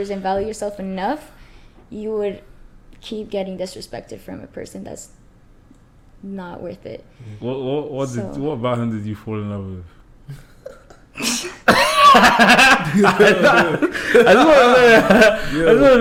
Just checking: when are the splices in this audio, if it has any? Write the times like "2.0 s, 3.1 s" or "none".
none